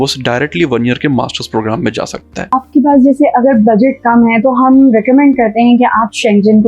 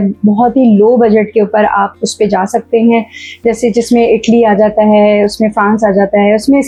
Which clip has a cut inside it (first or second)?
first